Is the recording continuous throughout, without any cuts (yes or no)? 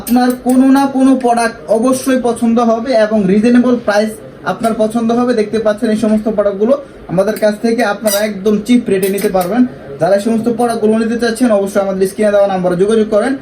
yes